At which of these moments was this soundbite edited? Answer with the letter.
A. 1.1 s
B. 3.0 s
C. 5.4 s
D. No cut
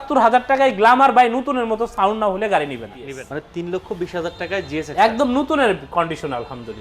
B